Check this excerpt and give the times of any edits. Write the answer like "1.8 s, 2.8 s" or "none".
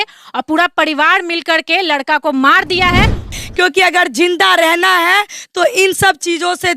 3.4 s